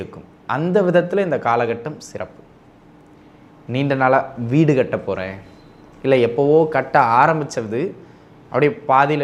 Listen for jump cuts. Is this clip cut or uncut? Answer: uncut